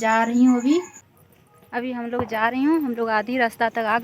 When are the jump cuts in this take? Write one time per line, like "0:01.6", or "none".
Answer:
0:01.0